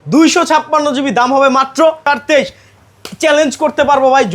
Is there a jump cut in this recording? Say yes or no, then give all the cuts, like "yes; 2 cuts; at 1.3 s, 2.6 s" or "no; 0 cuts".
yes; 1 cut; at 2.0 s